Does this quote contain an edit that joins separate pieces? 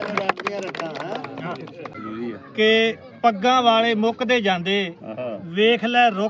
yes; 1 cut; at 1.9 s

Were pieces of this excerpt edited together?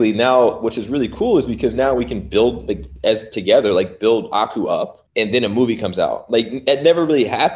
yes; 1 cut; at 5.0 s

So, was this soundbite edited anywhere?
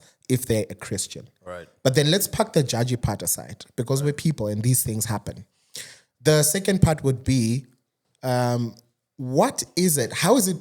no; 0 cuts

